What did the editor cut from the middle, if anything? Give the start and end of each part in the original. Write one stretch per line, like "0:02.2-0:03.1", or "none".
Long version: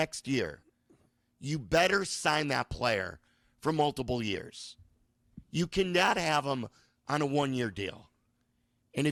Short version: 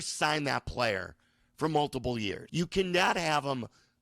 0:04.5-0:05.4